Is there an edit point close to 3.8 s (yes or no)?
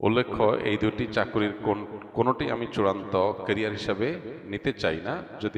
no